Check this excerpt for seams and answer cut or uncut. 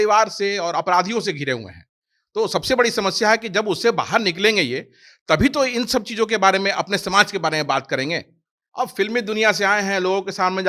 uncut